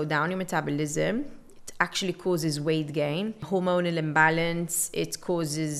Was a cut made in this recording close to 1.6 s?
no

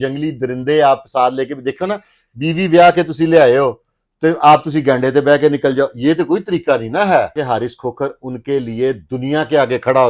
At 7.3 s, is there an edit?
yes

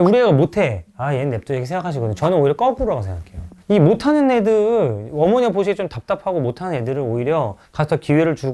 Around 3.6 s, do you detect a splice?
no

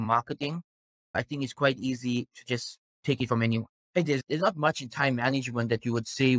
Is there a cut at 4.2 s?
yes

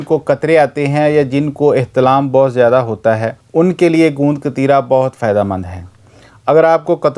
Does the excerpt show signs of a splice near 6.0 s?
no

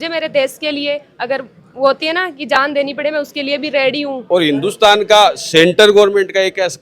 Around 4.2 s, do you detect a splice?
yes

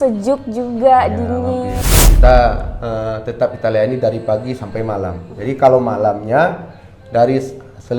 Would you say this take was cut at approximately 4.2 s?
no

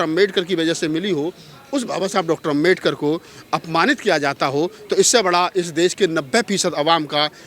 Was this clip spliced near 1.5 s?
no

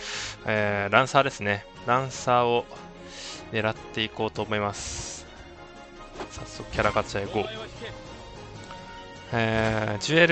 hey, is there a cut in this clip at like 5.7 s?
no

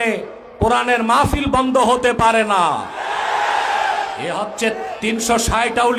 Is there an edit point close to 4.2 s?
yes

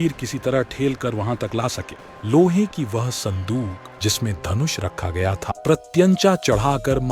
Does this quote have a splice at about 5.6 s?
yes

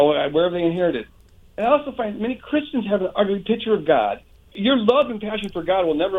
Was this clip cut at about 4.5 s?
yes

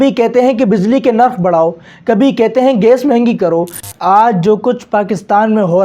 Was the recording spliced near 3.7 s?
yes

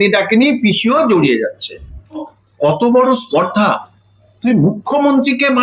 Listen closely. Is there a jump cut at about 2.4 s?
yes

